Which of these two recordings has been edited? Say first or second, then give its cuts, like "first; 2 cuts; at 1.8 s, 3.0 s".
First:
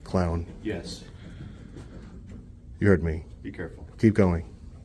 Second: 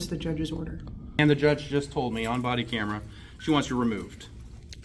second; 1 cut; at 1.2 s